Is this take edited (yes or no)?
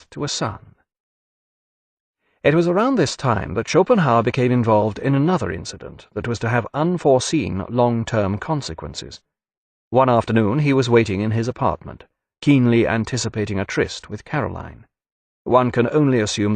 yes